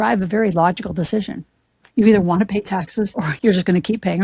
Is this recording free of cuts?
no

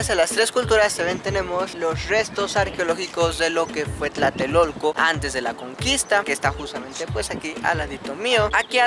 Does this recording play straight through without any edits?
yes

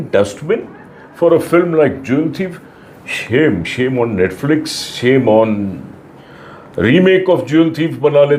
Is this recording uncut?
yes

